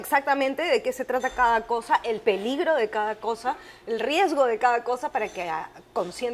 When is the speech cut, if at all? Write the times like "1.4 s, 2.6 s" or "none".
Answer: none